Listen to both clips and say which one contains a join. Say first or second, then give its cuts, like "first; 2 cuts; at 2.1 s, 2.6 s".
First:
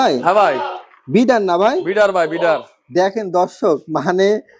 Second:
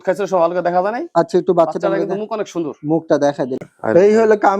second; 1 cut; at 3.7 s